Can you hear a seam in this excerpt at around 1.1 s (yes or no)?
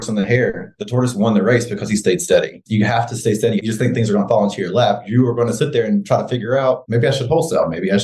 no